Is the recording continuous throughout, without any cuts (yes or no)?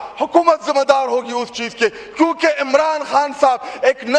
yes